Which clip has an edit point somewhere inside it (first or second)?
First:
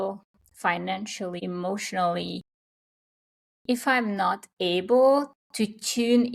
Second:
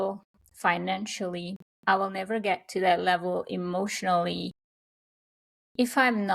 first